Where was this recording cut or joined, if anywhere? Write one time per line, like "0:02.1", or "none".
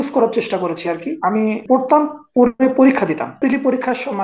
0:01.6
0:03.4

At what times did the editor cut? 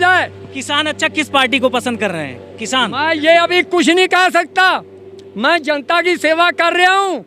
none

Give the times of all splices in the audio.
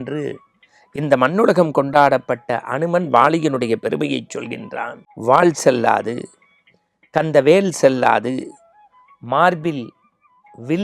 0:05.0

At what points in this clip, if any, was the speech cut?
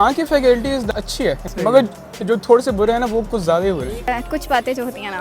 0:00.9
0:04.1

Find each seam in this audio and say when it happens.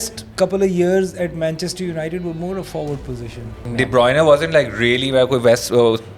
0:03.6

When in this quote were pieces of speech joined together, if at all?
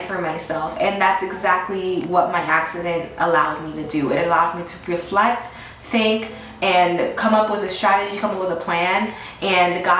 none

